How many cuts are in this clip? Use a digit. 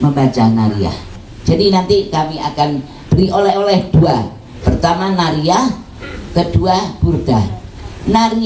1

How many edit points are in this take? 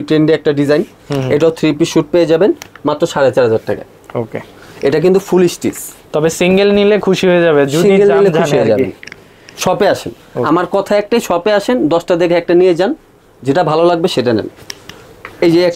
0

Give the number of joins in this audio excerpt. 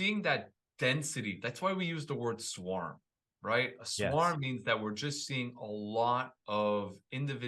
0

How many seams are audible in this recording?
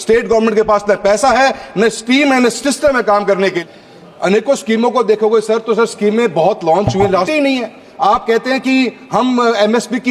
2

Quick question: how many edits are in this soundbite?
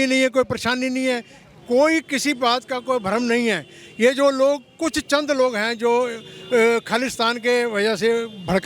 0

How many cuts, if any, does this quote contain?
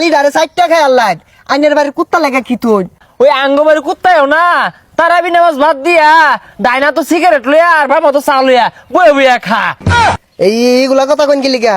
2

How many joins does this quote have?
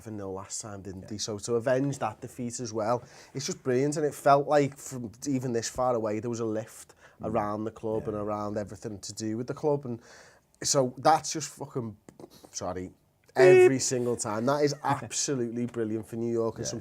1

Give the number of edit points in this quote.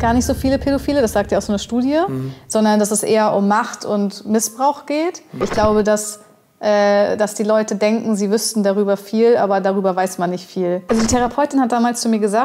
2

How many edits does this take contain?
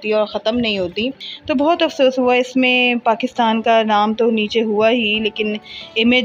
1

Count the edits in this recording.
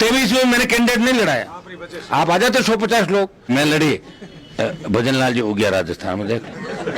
1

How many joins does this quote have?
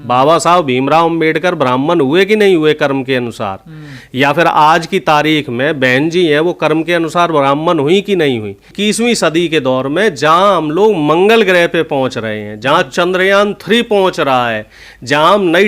1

